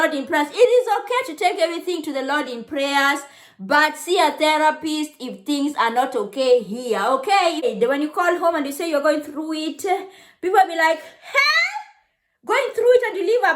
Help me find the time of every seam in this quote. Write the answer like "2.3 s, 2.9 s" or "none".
7.7 s